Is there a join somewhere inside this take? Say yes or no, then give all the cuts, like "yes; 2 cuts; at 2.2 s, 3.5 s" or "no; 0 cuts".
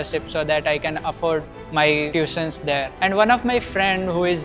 no; 0 cuts